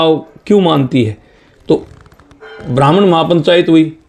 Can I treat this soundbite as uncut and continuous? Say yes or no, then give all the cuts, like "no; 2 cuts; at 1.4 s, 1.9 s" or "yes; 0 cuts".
yes; 0 cuts